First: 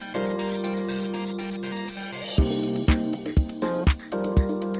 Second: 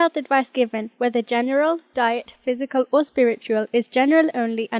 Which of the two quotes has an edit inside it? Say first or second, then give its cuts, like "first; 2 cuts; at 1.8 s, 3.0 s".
first; 1 cut; at 3.9 s